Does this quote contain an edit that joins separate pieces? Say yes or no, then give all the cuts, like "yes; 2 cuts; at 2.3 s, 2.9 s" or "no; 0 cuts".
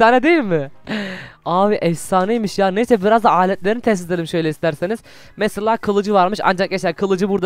no; 0 cuts